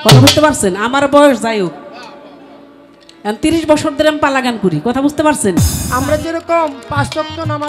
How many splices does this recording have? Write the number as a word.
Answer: one